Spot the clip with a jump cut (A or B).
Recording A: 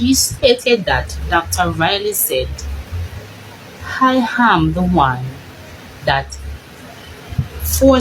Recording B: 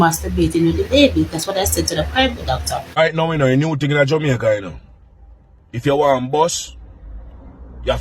B